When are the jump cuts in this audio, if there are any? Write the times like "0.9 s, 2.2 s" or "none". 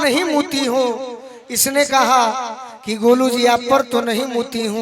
none